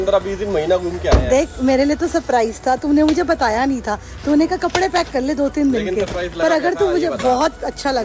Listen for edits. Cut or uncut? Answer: uncut